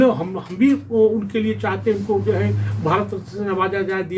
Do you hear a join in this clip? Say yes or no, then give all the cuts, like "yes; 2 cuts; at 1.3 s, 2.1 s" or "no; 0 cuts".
no; 0 cuts